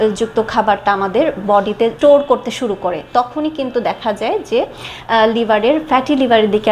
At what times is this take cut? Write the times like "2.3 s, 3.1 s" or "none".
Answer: 1.9 s